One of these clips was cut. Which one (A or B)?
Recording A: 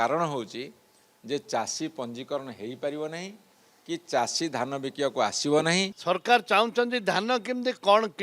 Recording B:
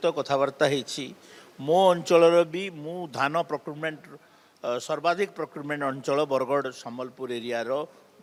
A